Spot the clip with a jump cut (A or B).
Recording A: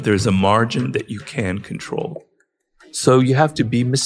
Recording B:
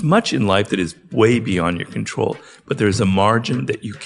A